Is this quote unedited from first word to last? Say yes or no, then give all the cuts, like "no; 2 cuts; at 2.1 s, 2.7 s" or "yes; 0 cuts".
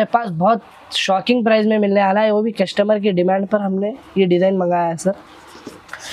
yes; 0 cuts